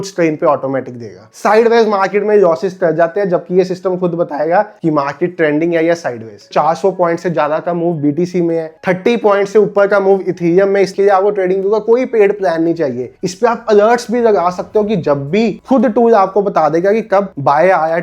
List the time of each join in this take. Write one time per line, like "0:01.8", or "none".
0:01.3
0:06.5
0:08.7
0:10.9
0:15.6